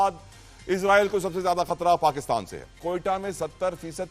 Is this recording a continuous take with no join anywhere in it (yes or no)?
no